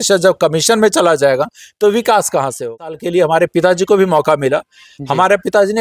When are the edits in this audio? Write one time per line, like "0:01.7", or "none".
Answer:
0:02.6